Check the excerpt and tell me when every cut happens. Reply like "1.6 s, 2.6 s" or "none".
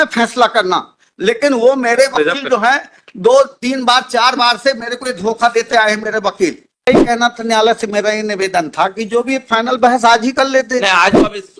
6.9 s